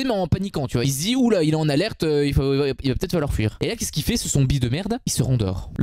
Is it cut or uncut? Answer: cut